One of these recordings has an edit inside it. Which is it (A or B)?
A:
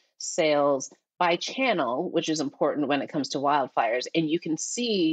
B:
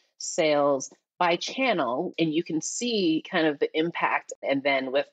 B